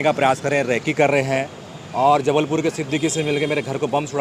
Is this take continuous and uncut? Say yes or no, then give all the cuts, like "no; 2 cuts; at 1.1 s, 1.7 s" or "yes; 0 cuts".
yes; 0 cuts